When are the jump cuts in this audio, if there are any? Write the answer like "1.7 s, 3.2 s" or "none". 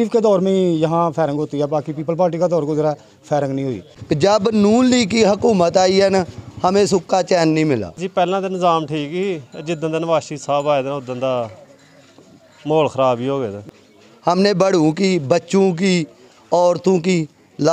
3.9 s, 8.0 s, 13.4 s